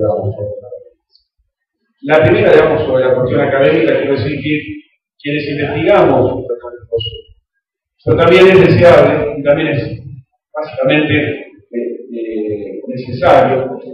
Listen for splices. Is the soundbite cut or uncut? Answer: uncut